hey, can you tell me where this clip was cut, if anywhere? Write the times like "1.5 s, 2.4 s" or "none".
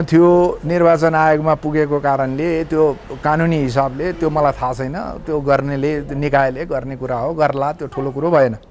none